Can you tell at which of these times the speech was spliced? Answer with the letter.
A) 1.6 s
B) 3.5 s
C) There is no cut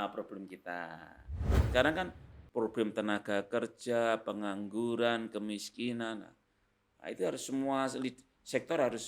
A